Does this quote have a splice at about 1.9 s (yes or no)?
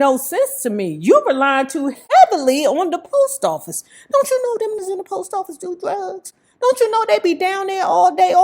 yes